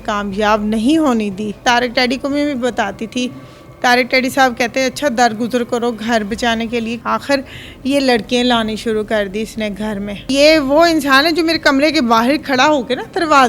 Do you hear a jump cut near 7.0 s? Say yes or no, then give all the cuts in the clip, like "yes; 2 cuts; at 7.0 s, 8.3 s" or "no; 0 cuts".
yes; 3 cuts; at 1.6 s, 7.0 s, 10.3 s